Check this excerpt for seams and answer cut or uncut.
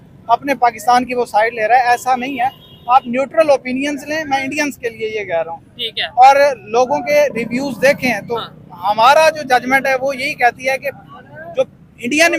uncut